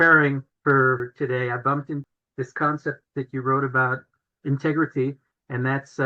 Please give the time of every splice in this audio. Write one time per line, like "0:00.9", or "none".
0:00.8
0:02.1
0:03.0
0:04.3